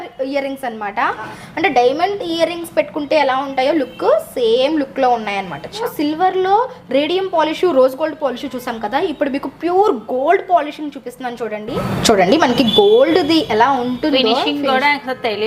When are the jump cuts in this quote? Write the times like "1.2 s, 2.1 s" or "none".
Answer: 1.4 s, 5.8 s, 12.1 s